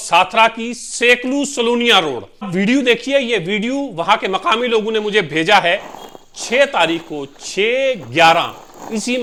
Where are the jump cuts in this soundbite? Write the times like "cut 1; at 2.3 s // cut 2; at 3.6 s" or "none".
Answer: none